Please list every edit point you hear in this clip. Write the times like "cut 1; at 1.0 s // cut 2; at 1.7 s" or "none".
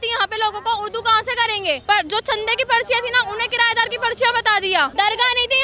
cut 1; at 1.8 s // cut 2; at 4.9 s